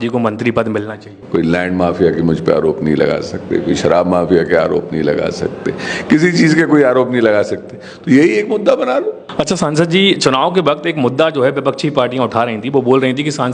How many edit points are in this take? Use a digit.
2